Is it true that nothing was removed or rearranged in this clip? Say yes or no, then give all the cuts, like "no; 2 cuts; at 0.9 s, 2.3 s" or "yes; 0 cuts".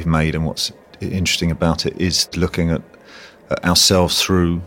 no; 1 cut; at 2.3 s